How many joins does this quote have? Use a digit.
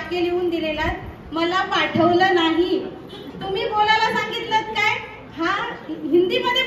0